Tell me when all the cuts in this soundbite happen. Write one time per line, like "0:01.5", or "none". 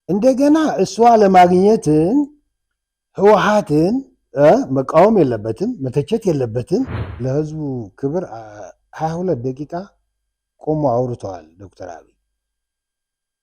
0:07.1